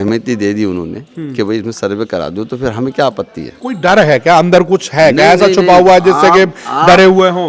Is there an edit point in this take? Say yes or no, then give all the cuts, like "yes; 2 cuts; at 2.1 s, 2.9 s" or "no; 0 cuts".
no; 0 cuts